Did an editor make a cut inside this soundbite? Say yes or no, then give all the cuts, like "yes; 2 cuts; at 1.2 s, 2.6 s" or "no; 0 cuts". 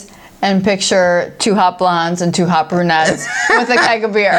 no; 0 cuts